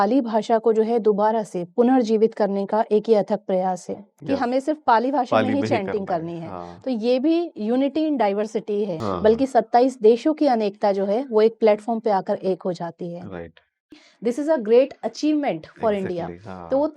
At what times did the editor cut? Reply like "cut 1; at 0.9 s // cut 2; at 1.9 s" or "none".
cut 1; at 4.1 s // cut 2; at 9.0 s // cut 3; at 14.0 s